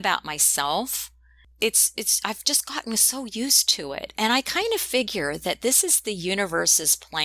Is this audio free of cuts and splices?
no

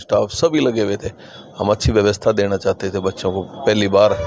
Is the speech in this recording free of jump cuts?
yes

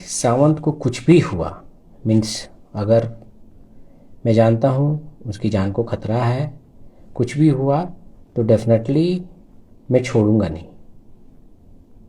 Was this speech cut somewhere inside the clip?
no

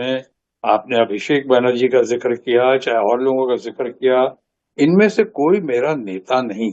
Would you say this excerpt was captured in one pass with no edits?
yes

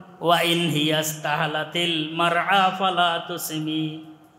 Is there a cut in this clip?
no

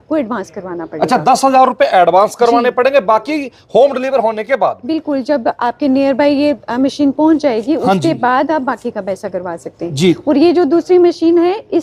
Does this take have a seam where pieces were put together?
no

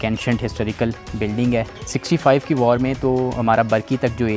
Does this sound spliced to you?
yes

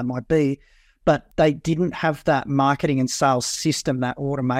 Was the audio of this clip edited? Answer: yes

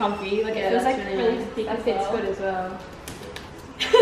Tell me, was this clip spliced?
no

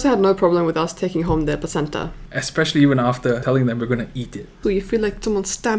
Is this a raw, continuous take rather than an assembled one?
no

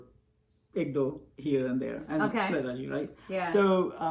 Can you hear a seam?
no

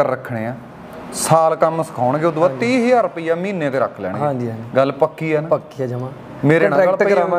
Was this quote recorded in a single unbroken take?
yes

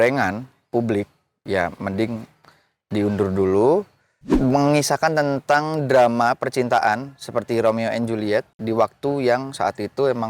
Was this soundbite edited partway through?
yes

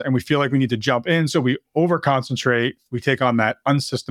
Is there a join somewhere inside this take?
no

